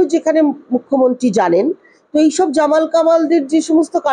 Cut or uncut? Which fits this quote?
uncut